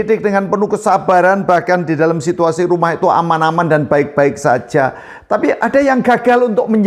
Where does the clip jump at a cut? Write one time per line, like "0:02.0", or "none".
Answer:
none